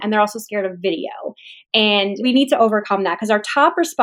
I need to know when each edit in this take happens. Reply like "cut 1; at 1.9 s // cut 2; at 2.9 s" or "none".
cut 1; at 2.2 s